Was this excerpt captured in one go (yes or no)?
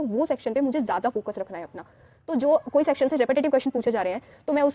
yes